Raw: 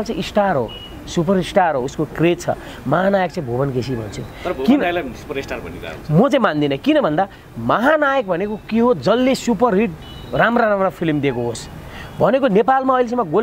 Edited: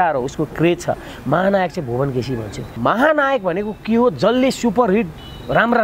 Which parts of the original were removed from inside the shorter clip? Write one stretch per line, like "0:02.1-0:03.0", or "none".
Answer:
0:04.2-0:07.5